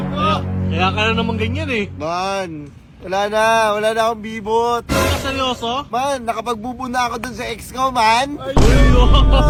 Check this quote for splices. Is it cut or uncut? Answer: uncut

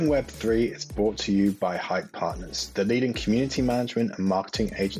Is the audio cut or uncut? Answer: uncut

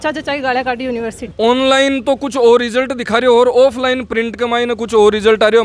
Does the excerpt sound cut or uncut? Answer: cut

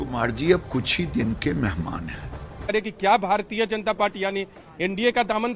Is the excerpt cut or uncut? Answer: cut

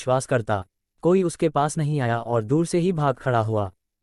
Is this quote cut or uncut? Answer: uncut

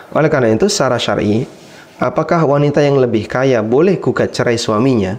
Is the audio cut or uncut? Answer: uncut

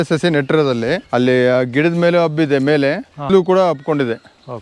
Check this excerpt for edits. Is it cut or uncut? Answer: cut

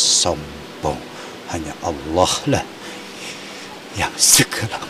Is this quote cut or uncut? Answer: uncut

